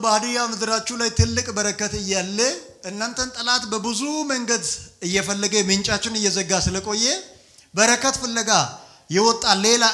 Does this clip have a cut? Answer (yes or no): no